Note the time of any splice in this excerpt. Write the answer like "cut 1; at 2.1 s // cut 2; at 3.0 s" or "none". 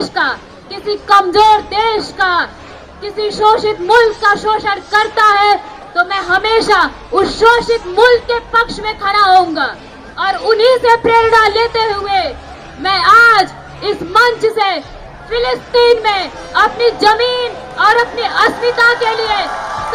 none